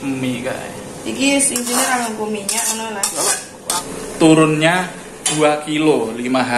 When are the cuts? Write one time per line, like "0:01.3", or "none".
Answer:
0:03.7